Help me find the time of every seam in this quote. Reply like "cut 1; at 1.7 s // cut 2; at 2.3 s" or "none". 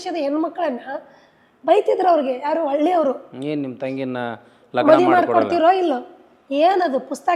none